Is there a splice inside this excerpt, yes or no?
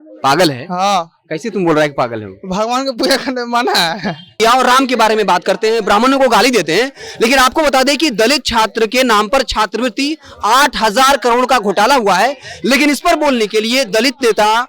yes